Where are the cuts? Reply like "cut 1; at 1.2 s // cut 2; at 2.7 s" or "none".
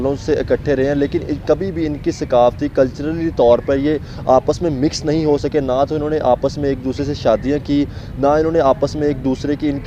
none